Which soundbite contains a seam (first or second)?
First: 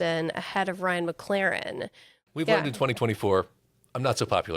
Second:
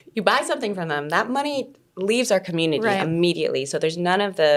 first